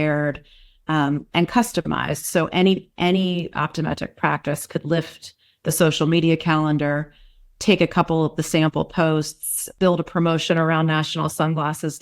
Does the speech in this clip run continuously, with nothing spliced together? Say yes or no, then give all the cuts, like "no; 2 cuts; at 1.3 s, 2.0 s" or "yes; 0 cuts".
no; 1 cut; at 9.6 s